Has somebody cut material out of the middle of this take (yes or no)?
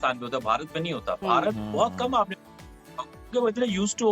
no